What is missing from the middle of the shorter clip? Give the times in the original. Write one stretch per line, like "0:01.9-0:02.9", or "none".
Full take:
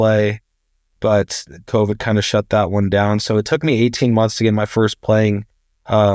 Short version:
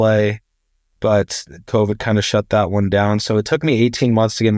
none